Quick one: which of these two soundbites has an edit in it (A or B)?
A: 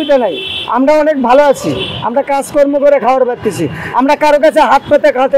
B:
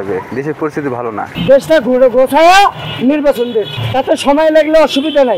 B